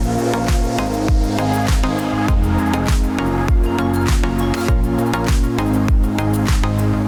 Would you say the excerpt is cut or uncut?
uncut